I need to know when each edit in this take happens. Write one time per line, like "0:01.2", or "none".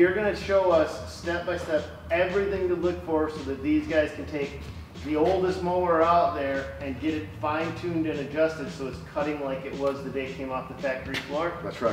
none